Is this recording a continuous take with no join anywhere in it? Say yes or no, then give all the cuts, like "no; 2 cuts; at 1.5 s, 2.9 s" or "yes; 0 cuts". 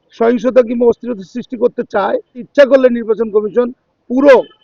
no; 1 cut; at 2.4 s